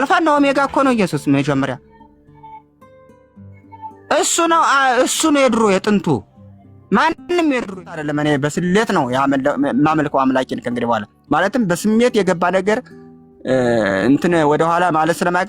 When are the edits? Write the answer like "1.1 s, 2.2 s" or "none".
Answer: 7.9 s